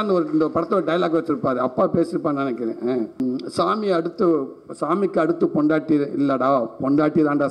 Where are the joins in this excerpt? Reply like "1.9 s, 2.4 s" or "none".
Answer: 3.2 s